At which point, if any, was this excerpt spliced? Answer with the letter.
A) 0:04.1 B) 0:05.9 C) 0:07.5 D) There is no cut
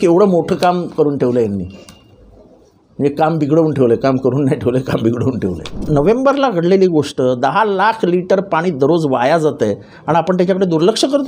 B